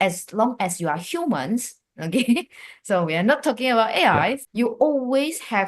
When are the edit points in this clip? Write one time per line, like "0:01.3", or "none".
0:04.4